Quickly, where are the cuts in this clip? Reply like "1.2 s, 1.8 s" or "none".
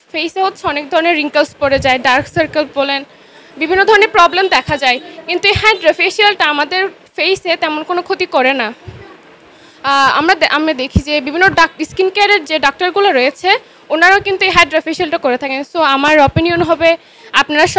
none